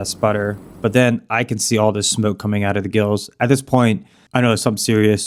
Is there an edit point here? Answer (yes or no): no